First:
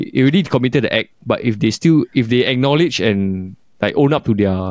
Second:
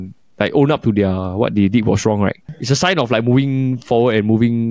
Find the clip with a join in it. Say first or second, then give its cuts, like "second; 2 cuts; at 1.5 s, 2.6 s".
second; 1 cut; at 2.5 s